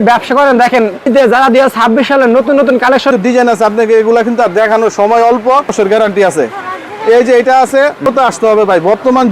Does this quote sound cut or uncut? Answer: cut